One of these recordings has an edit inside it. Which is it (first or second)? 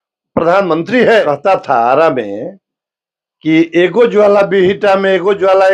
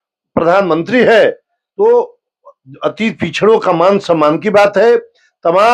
first